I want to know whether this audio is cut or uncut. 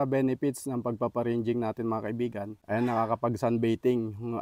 cut